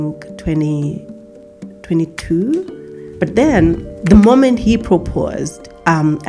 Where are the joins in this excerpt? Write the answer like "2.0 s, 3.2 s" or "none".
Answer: 3.1 s, 3.9 s